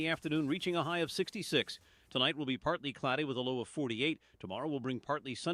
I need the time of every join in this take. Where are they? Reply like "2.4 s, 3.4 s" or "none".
none